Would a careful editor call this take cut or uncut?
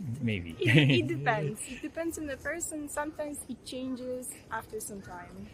uncut